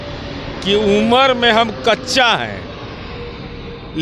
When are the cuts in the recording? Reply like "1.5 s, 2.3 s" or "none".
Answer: none